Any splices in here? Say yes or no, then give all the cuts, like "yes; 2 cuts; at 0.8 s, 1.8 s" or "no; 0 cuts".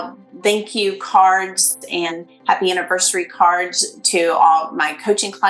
yes; 1 cut; at 2.1 s